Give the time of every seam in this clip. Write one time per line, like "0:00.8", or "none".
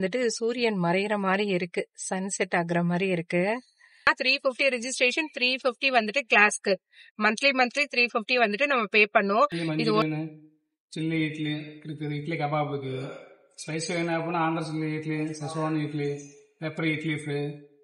0:04.1
0:10.0